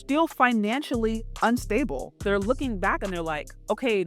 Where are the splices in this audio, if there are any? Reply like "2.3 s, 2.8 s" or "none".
2.2 s